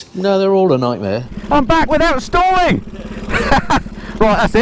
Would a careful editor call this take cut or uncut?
cut